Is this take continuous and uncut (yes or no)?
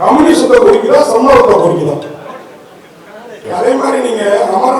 no